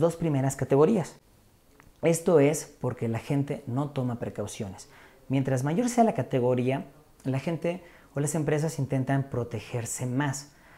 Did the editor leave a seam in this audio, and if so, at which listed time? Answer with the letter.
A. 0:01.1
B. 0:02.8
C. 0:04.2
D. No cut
D